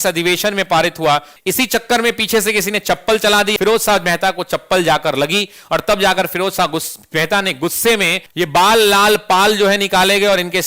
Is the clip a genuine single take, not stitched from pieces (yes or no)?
no